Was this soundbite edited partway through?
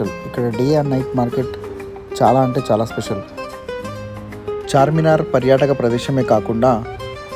no; 0 cuts

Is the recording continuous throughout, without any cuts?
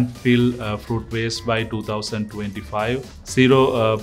yes; 0 cuts

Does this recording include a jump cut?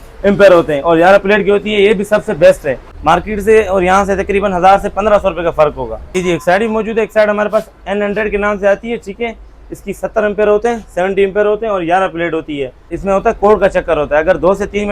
yes; 3 cuts; at 2.9 s, 6.2 s, 13.0 s

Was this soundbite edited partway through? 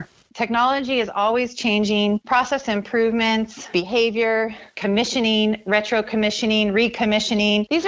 no; 0 cuts

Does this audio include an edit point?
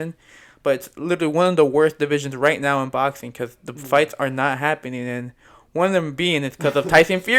no; 0 cuts

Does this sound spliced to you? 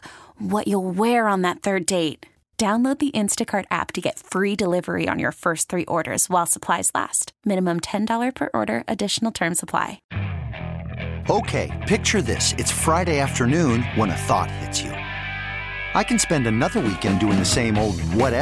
yes; 1 cut; at 10.1 s

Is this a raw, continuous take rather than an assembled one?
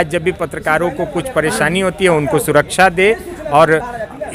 yes; 0 cuts

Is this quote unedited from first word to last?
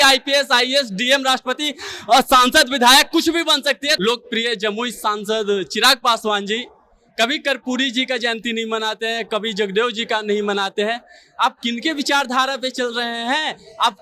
no; 1 cut; at 4.0 s

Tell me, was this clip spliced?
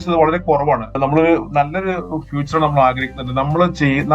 yes; 1 cut; at 1.0 s

